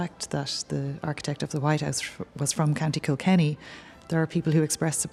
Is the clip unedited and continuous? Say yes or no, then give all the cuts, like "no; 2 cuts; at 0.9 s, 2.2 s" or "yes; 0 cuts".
yes; 0 cuts